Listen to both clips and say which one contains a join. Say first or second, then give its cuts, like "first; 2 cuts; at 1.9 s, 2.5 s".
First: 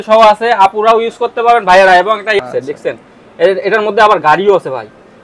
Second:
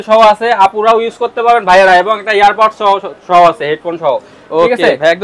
first; 1 cut; at 2.4 s